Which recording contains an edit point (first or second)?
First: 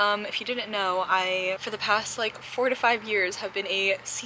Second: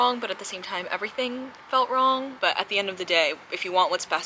second